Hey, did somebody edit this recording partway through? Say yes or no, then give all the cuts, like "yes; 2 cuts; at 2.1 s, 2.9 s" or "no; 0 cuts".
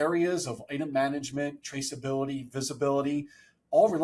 no; 0 cuts